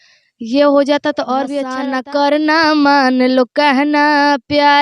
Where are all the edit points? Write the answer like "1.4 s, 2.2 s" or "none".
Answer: 1.7 s